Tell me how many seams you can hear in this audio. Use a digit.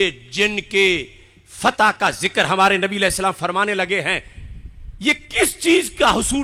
0